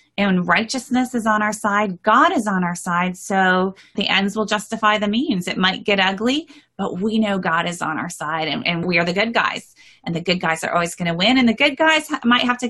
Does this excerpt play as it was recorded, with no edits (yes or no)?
no